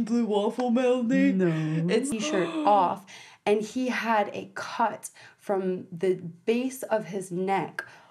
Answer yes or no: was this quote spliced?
yes